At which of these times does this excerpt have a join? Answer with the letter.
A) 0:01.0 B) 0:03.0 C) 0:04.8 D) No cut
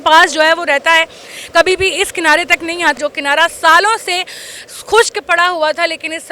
B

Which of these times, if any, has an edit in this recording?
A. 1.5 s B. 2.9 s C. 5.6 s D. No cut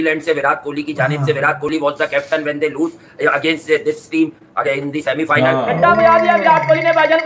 C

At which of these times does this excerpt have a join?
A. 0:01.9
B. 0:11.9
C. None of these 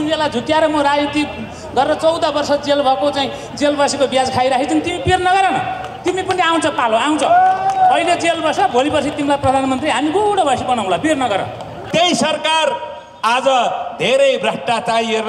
B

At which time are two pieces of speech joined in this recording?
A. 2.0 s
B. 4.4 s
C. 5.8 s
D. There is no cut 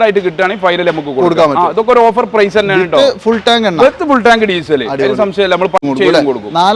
C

